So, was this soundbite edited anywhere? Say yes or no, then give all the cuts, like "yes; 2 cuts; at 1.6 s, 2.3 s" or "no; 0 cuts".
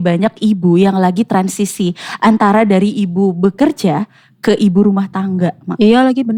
no; 0 cuts